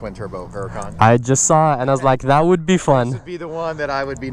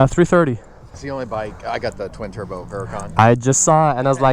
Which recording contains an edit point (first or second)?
second